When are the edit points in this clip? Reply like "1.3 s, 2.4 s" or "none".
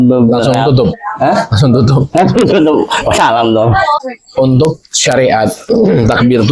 4.0 s